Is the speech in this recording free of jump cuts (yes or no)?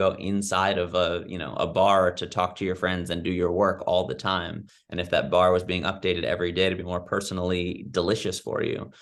yes